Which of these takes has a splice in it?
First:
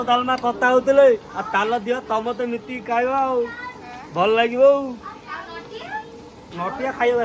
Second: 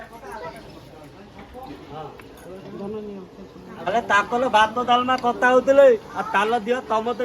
second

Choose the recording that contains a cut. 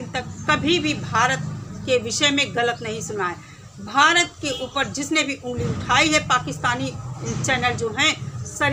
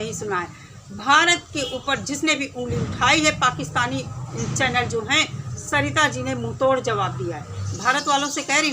second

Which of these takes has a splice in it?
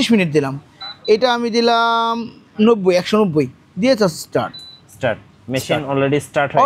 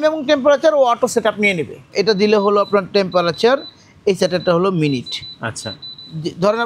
second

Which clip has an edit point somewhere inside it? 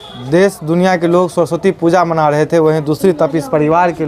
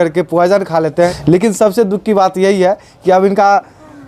second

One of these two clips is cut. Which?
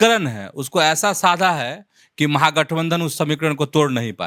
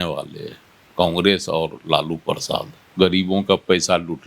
second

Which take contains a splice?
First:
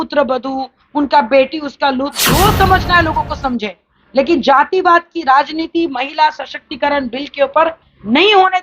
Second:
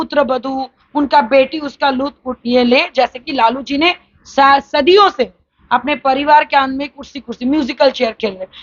first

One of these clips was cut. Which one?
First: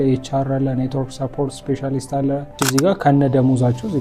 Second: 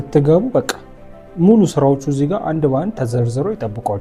first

